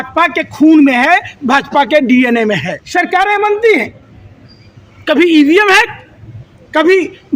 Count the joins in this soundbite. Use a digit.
1